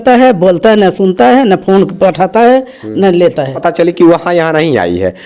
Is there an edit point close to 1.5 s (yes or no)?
no